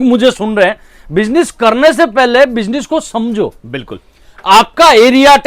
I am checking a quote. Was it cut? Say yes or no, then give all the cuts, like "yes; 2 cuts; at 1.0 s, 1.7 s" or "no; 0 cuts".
no; 0 cuts